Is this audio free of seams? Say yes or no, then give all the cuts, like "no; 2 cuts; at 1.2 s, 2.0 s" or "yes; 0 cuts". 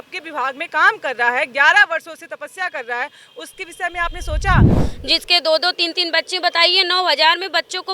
no; 1 cut; at 4.8 s